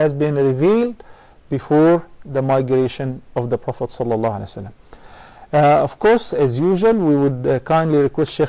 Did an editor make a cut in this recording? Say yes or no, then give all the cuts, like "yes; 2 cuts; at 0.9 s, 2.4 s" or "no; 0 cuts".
no; 0 cuts